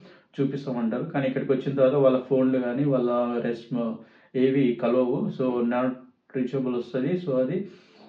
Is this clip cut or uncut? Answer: uncut